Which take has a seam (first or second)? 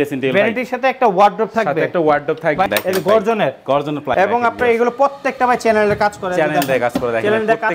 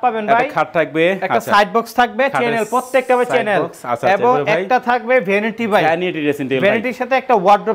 first